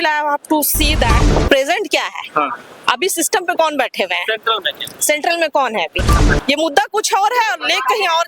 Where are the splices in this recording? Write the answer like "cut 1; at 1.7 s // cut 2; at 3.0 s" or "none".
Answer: cut 1; at 1.2 s // cut 2; at 6.1 s

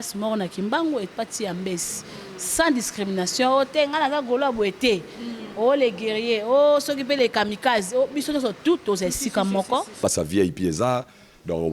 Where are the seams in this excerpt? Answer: cut 1; at 9.9 s

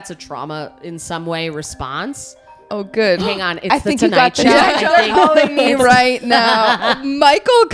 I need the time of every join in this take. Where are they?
none

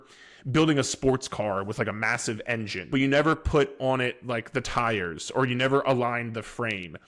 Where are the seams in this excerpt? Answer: cut 1; at 2.8 s

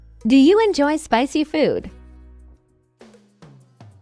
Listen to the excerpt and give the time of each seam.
cut 1; at 2.5 s

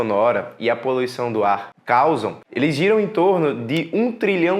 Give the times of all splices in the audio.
cut 1; at 1.7 s // cut 2; at 2.4 s

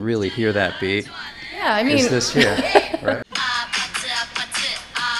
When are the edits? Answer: cut 1; at 3.1 s

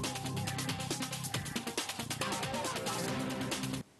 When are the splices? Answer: cut 1; at 1.1 s

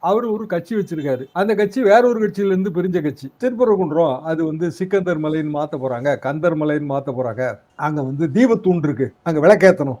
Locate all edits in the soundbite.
none

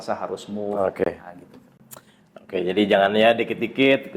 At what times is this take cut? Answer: none

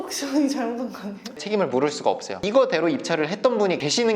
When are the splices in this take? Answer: cut 1; at 2.3 s

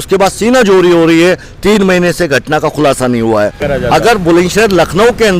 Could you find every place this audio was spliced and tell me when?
cut 1; at 3.6 s

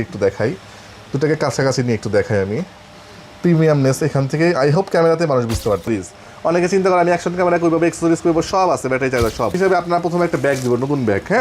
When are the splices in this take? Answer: cut 1; at 5.9 s // cut 2; at 9.5 s

